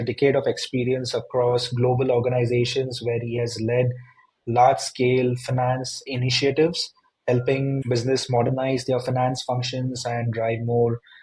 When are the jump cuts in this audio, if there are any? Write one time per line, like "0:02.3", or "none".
none